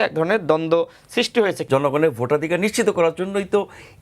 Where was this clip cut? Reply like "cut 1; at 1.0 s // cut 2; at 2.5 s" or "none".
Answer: cut 1; at 1.6 s